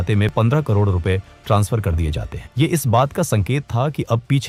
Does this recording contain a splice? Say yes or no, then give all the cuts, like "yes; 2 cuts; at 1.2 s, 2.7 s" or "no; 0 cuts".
no; 0 cuts